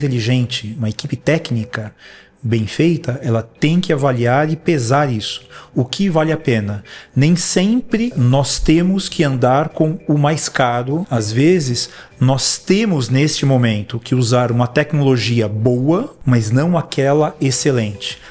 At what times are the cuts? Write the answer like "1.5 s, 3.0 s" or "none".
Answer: 8.2 s, 11.1 s, 16.1 s